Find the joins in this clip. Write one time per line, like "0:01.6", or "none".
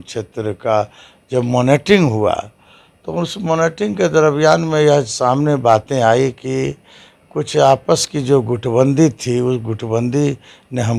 none